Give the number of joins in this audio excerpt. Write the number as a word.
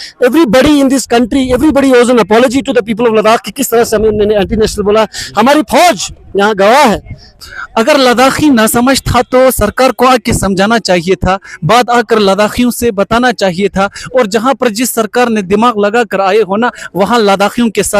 one